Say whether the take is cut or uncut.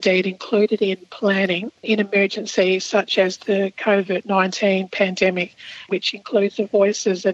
cut